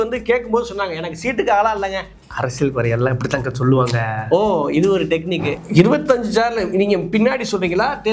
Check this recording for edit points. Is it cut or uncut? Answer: cut